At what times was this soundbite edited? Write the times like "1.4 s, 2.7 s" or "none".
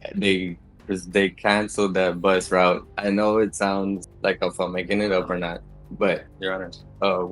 2.9 s, 6.3 s